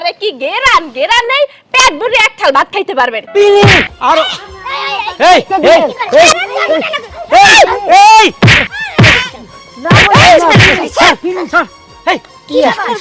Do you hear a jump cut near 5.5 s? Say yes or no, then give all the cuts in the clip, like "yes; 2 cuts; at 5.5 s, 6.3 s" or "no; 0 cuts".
no; 1 cut; at 3.2 s